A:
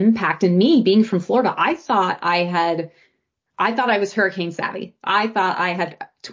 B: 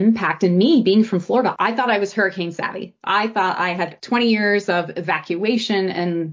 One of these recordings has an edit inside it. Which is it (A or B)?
B